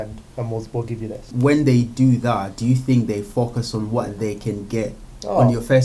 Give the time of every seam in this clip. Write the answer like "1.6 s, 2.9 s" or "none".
1.3 s